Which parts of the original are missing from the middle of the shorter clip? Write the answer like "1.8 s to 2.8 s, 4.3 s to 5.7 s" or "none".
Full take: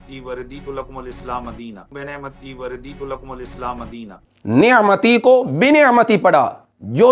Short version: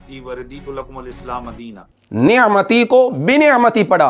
1.7 s to 4.1 s